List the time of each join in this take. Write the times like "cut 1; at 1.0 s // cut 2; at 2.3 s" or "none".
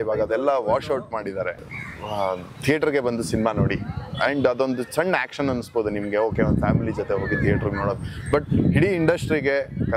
cut 1; at 1.6 s